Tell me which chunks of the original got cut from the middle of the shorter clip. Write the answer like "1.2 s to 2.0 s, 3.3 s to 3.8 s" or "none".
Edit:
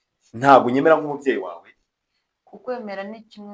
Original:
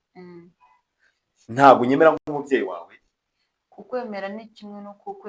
2.2 s to 2.3 s